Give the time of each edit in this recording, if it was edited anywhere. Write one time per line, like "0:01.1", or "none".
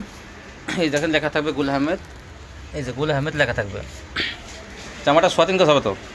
none